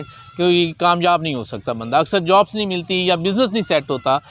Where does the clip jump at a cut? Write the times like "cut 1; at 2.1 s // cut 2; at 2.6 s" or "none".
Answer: none